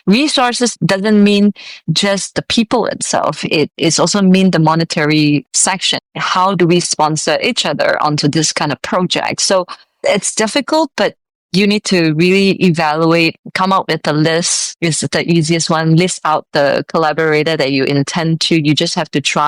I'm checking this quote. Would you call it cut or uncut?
uncut